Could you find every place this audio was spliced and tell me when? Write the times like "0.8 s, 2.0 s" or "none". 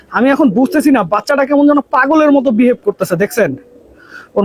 none